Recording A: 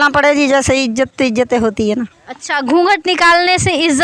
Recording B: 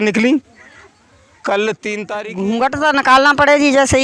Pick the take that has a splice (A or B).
B